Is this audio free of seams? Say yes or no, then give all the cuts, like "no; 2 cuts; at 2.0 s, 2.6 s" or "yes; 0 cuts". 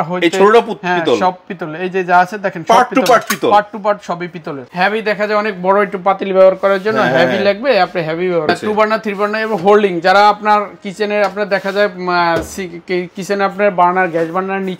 no; 2 cuts; at 4.6 s, 8.5 s